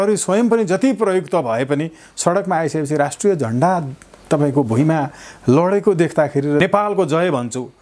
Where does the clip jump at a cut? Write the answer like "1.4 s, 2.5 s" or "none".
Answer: 6.6 s

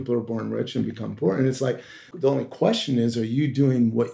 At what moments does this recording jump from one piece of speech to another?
2.1 s

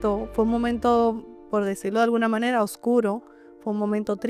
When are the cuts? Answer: none

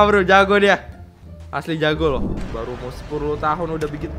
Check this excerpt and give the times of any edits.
2.5 s

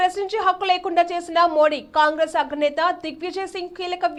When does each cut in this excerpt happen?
none

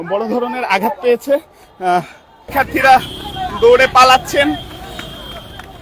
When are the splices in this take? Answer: 2.4 s

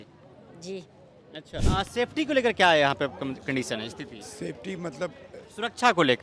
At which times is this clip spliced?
1.6 s

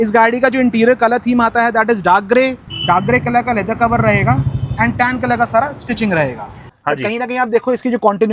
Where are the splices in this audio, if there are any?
2.7 s, 6.7 s

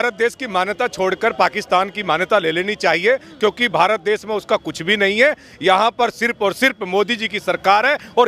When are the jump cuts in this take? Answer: none

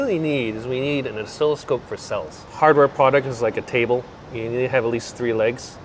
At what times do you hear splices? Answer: 2.5 s

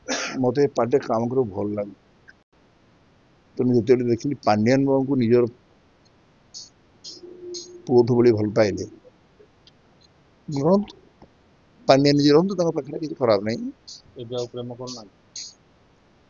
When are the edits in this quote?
2.5 s

